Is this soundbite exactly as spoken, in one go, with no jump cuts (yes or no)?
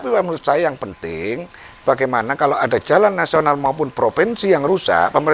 yes